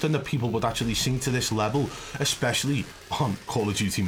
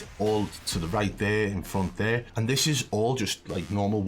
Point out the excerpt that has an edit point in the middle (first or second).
second